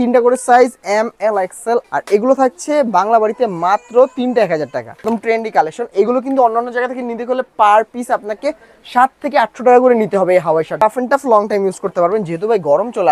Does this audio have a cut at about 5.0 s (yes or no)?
yes